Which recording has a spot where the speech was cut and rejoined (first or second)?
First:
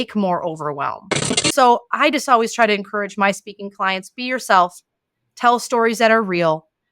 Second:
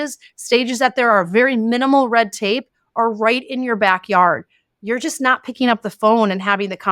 first